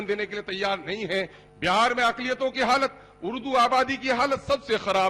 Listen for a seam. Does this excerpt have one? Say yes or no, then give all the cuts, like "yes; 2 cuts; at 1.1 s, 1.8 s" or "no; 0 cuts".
yes; 1 cut; at 1.4 s